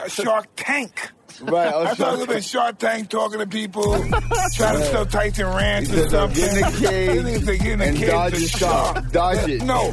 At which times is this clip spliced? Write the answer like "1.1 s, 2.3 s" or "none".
none